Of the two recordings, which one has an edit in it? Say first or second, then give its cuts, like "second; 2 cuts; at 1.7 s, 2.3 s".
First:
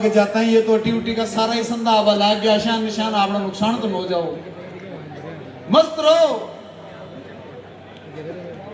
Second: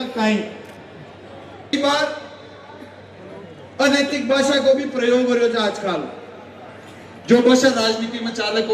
second; 1 cut; at 1.7 s